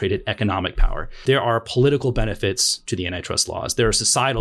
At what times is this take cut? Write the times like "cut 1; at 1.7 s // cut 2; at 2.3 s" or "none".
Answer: cut 1; at 1.2 s